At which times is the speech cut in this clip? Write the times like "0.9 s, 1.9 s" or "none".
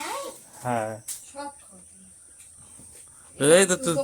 1.2 s